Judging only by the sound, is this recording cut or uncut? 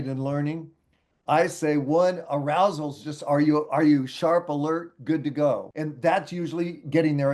cut